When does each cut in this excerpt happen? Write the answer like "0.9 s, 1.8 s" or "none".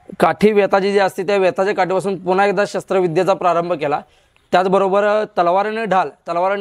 none